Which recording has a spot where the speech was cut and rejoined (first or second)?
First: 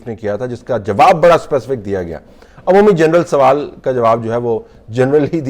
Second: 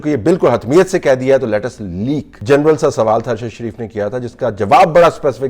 second